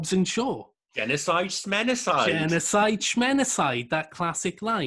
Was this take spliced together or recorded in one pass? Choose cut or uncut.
uncut